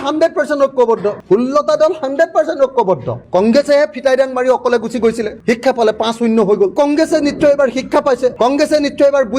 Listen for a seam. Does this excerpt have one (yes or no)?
yes